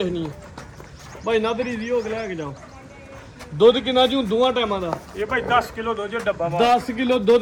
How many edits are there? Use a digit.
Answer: 0